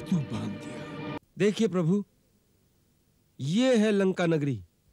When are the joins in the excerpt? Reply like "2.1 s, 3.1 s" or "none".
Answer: 1.2 s